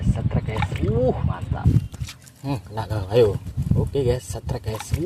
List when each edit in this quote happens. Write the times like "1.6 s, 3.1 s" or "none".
1.6 s